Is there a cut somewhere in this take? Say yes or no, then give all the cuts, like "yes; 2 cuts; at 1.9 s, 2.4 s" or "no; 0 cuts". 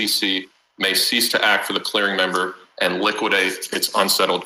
no; 0 cuts